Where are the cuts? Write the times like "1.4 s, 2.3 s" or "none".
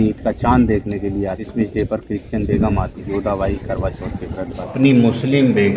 1.5 s, 3.0 s, 4.7 s